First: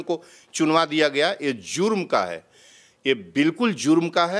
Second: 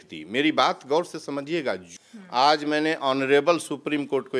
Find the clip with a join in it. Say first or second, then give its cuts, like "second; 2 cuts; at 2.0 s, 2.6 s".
second; 1 cut; at 1.9 s